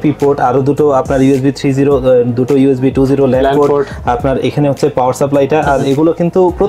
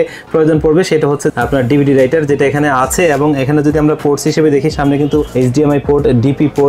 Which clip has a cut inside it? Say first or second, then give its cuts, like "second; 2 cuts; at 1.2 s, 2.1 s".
second; 2 cuts; at 1.3 s, 5.3 s